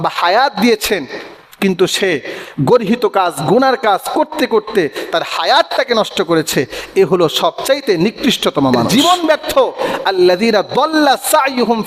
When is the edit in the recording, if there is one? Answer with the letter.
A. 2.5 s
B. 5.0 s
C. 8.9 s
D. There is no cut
C